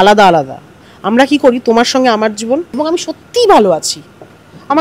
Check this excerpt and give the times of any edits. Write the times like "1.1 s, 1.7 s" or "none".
2.8 s